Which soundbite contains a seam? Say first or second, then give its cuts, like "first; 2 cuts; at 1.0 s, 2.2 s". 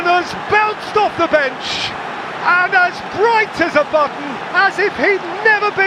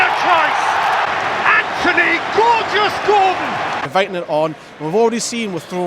second; 1 cut; at 3.8 s